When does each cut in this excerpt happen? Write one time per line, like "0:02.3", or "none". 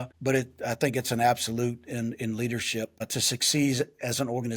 none